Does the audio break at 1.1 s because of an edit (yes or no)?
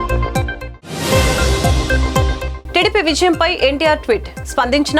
no